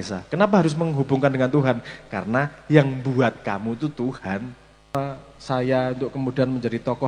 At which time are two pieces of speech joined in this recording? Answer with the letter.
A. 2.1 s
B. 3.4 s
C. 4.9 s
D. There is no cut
C